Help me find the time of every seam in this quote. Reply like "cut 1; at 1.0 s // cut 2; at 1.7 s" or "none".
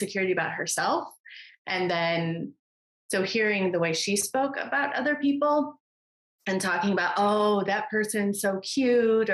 none